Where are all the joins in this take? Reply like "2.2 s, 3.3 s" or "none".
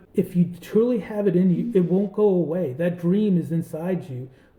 none